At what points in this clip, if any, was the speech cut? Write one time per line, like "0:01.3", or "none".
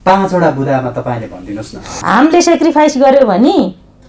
0:02.0